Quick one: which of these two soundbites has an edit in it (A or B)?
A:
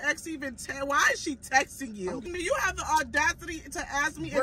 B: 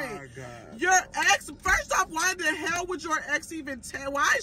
A